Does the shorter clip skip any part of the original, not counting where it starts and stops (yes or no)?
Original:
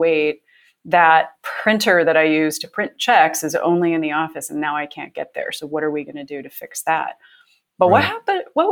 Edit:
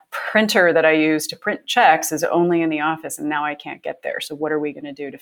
no